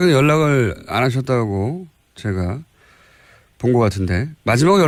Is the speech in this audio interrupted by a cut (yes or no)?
no